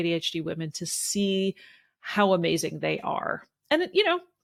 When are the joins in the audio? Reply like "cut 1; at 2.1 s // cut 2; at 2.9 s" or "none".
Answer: none